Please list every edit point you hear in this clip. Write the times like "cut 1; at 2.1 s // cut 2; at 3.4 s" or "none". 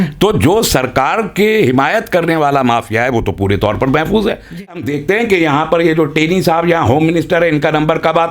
cut 1; at 5.0 s